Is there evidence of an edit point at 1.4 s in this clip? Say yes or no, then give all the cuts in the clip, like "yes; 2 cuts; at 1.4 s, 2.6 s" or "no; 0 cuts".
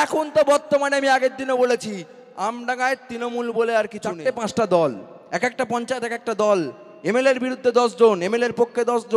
no; 1 cut; at 4.2 s